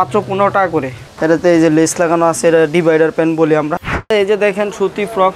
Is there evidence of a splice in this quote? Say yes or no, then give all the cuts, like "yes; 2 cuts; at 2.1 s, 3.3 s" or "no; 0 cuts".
yes; 2 cuts; at 1.0 s, 4.1 s